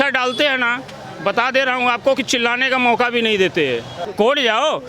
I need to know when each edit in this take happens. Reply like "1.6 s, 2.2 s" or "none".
4.0 s